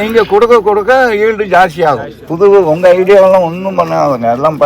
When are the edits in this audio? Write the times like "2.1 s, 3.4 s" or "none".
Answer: 2.2 s